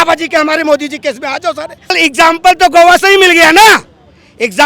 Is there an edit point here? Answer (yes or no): yes